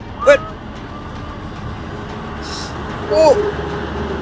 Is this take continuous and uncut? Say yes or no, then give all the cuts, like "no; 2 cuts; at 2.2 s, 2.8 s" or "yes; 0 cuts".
yes; 0 cuts